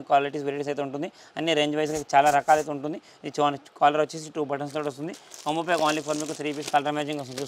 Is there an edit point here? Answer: no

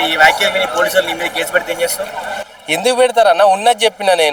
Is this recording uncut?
yes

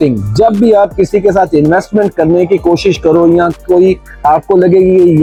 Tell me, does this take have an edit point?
no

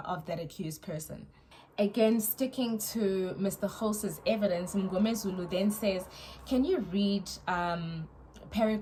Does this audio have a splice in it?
no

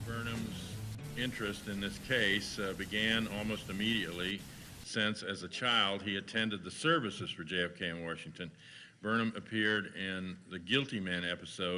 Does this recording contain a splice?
no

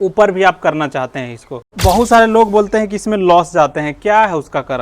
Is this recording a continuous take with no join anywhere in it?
no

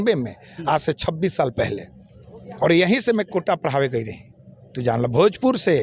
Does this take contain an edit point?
no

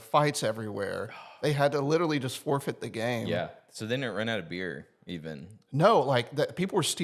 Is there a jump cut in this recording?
no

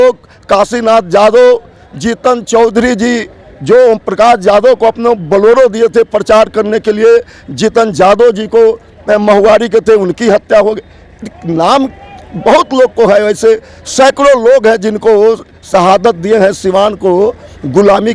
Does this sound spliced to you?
no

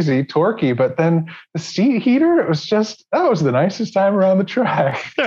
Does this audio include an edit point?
no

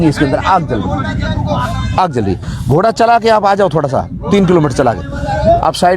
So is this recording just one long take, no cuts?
yes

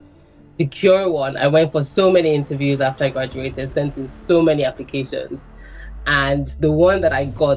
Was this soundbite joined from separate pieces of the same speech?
no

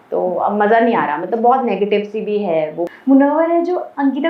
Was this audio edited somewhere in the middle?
yes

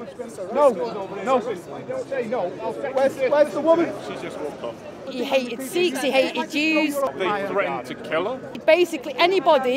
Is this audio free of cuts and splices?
no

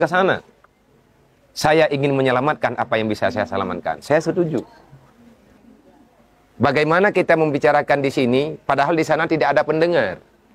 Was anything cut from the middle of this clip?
yes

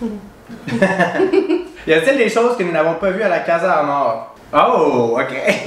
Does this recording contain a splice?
yes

